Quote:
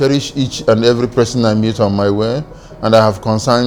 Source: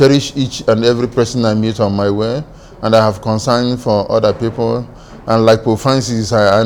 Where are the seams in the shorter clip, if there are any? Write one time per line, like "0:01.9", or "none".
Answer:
none